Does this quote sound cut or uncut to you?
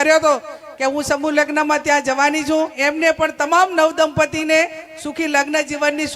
cut